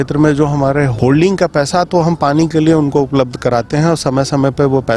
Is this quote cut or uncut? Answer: cut